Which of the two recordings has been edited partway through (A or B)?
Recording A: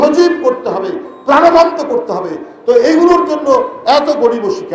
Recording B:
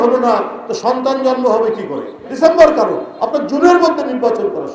B